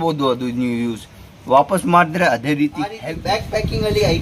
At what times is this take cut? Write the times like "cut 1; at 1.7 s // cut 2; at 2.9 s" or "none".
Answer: cut 1; at 3.1 s